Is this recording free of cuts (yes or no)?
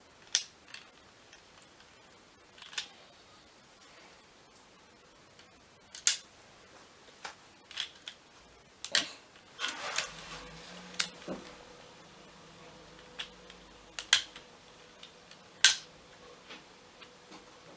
yes